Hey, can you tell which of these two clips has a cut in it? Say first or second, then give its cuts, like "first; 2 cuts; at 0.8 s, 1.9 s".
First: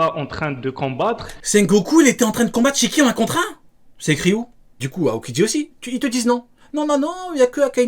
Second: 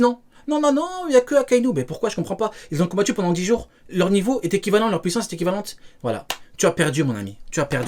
first; 2 cuts; at 1.3 s, 4.9 s